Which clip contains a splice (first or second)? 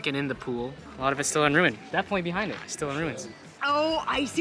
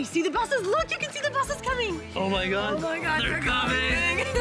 first